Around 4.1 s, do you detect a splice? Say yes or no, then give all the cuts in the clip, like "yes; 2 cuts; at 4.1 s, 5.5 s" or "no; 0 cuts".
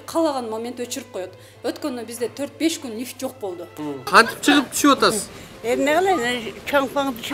yes; 1 cut; at 4.1 s